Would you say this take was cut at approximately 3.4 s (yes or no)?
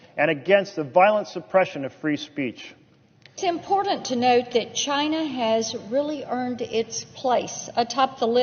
yes